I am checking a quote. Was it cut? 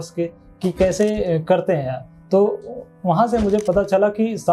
no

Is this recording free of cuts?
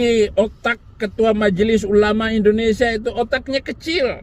yes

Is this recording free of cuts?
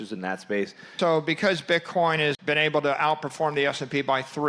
no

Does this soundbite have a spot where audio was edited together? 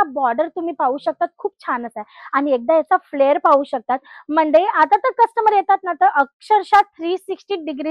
no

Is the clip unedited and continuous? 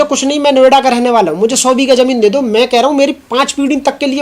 yes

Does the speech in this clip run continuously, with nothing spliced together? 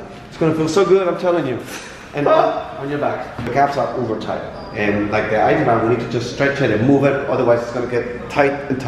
yes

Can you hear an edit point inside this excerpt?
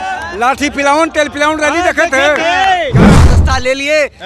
yes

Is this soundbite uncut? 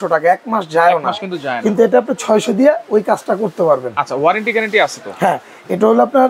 yes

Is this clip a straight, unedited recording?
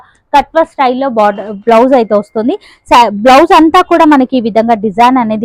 yes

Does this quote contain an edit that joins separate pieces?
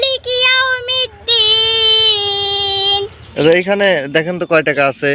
yes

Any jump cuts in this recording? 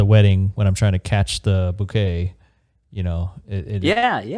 no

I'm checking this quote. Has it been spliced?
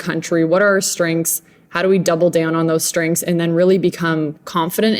no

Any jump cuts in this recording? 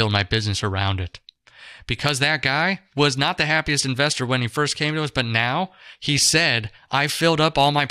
yes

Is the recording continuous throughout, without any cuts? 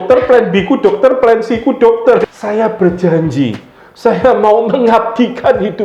no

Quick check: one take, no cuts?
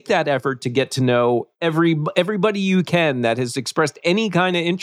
yes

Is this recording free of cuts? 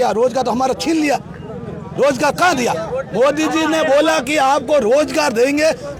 yes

